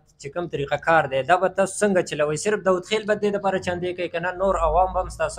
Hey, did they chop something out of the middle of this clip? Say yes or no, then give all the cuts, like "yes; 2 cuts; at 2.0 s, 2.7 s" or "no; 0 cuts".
no; 0 cuts